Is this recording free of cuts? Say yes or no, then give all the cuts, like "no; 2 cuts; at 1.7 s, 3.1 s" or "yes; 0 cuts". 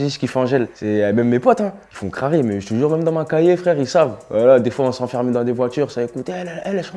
yes; 0 cuts